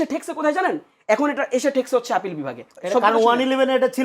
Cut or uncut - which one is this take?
cut